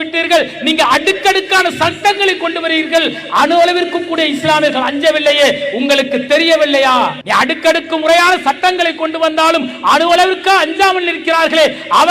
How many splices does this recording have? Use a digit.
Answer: 1